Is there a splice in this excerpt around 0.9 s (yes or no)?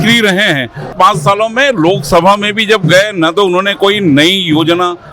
yes